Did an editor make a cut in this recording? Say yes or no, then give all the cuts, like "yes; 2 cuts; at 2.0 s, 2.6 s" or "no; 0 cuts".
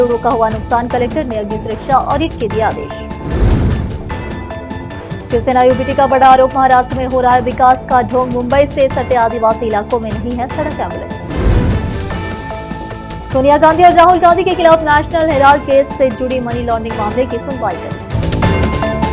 no; 0 cuts